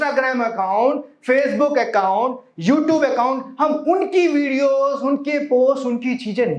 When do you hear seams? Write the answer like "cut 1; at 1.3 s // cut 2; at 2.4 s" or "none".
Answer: none